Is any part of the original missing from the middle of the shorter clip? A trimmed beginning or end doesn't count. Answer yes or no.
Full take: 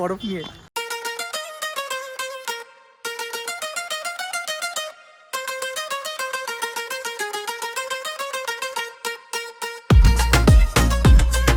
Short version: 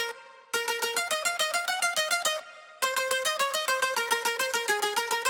no